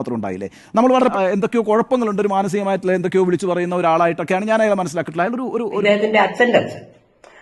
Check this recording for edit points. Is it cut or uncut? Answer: cut